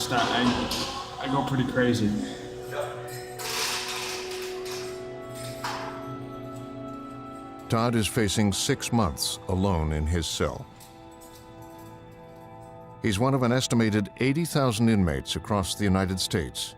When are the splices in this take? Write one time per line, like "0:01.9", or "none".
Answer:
0:11.0